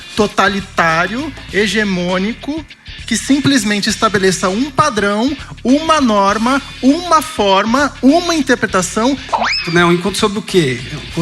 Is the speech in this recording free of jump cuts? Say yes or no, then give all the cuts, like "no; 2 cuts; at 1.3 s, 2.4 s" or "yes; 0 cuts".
no; 1 cut; at 9.6 s